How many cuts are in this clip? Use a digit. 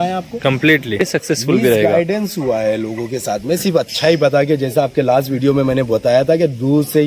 1